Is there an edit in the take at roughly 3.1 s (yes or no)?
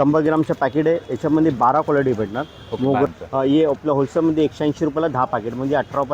yes